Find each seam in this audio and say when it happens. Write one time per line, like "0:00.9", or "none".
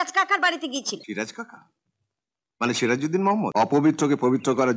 0:01.0
0:03.5